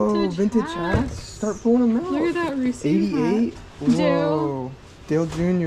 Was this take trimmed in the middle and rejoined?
no; 0 cuts

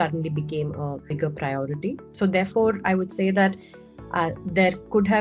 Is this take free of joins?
no; 1 cut; at 2.0 s

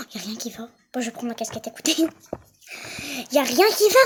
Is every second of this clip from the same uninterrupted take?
yes; 0 cuts

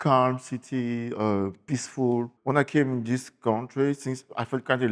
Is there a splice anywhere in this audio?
yes; 1 cut; at 2.3 s

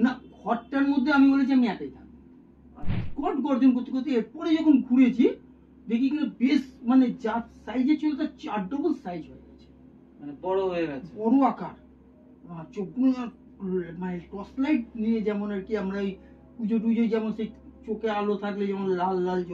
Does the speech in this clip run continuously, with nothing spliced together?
no; 1 cut; at 3.0 s

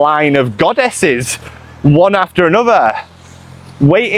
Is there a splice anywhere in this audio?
no; 0 cuts

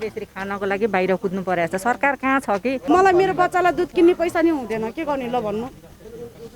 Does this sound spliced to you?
yes; 1 cut; at 2.8 s

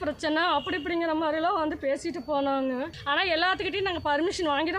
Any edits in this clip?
yes; 1 cut; at 3.0 s

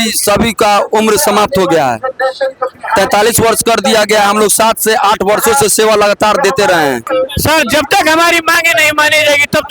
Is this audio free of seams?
no; 1 cut; at 7.0 s

